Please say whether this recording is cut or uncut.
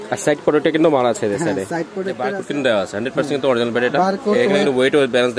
cut